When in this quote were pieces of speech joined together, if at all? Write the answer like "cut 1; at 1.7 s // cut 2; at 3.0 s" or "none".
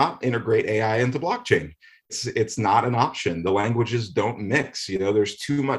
cut 1; at 2.1 s